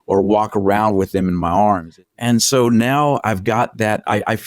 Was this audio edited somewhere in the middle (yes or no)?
yes